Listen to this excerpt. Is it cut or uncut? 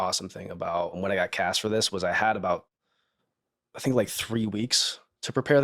cut